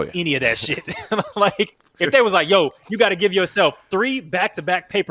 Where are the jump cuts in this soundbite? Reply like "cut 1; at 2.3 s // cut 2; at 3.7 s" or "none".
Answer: cut 1; at 2.1 s